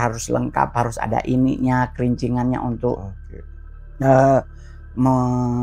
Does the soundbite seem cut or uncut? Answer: uncut